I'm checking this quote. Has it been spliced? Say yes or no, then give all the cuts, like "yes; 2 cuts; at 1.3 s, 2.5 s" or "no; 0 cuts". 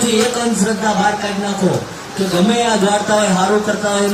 no; 0 cuts